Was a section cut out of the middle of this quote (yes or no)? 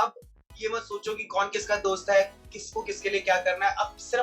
no